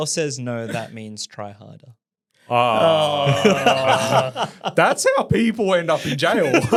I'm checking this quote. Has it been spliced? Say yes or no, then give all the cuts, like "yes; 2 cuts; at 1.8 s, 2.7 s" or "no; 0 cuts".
no; 0 cuts